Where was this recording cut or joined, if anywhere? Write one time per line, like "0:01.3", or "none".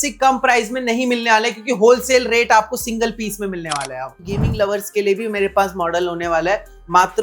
0:04.1